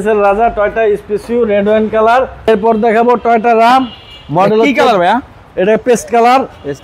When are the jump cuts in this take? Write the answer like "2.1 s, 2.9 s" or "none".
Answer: 2.5 s